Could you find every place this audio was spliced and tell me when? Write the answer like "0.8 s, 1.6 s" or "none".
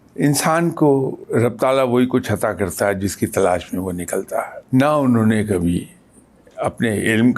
1.2 s, 4.6 s